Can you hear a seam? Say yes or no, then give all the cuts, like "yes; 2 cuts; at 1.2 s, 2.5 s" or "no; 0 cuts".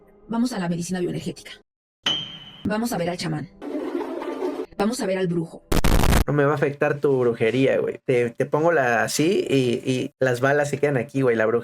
yes; 1 cut; at 6.3 s